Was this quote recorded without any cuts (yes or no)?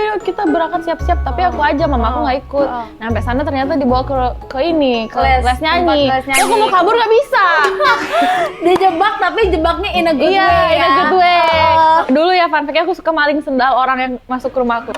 no